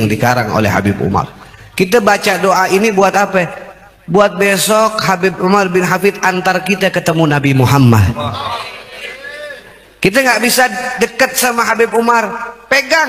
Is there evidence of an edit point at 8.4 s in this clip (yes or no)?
no